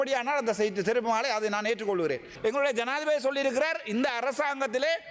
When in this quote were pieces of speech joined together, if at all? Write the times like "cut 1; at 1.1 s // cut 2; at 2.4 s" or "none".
cut 1; at 2.3 s